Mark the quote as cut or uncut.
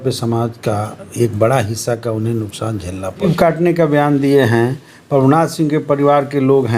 cut